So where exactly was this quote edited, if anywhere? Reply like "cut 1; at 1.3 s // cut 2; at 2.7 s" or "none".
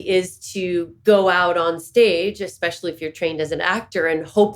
none